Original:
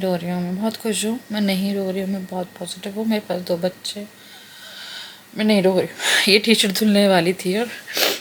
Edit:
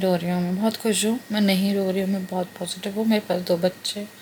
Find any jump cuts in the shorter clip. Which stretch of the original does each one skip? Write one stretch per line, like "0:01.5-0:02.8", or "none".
none